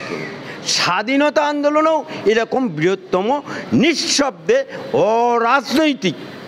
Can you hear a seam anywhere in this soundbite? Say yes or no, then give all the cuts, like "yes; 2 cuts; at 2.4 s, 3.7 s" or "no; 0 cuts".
no; 0 cuts